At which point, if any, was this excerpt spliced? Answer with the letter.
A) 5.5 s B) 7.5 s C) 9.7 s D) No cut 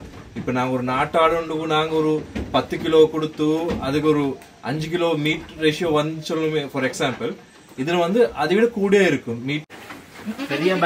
C